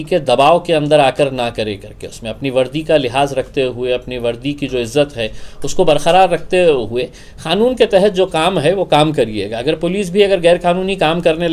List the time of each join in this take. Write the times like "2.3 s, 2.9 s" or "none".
none